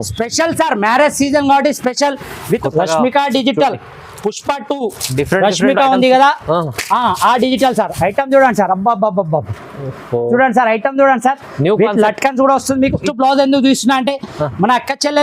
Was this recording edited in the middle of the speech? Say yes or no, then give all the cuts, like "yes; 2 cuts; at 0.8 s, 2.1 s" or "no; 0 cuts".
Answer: yes; 2 cuts; at 2.7 s, 13.0 s